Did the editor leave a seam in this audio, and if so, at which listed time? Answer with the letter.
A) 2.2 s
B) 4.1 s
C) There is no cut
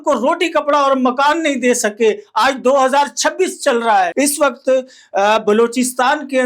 B